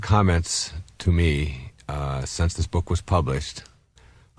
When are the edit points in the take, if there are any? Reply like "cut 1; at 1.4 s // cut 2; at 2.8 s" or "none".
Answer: none